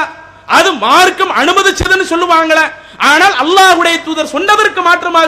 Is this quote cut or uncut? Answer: uncut